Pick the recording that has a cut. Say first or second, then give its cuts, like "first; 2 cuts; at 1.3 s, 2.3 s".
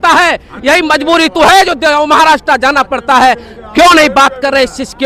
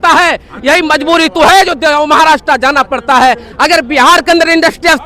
second; 1 cut; at 3.5 s